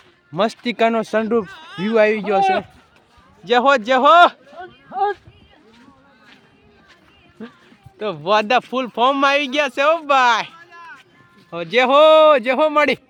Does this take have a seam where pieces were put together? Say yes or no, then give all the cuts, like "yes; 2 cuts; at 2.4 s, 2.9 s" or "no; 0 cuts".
no; 0 cuts